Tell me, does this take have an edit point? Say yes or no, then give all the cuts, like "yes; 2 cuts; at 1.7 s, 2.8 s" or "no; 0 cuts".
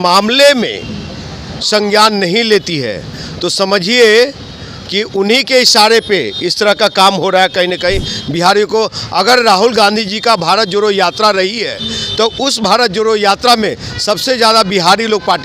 no; 0 cuts